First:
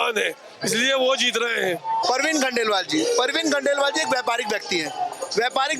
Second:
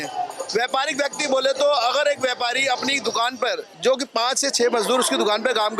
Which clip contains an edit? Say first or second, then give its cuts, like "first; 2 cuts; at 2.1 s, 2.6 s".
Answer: first; 1 cut; at 2.0 s